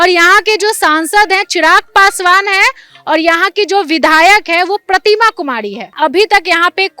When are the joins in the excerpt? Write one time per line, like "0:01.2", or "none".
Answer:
0:05.9